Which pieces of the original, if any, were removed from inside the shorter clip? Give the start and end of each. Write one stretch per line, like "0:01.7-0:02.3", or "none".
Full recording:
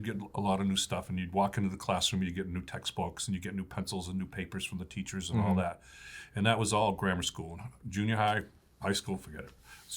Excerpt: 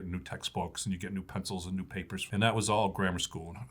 0:04.6-0:06.2